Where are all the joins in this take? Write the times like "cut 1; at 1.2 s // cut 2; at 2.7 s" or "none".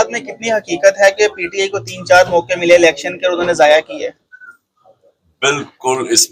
none